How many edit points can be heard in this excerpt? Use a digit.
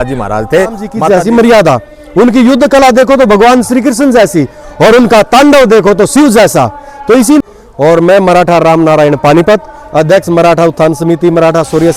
2